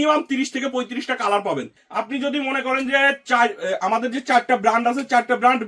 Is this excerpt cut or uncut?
cut